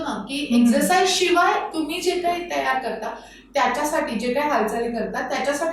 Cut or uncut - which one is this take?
uncut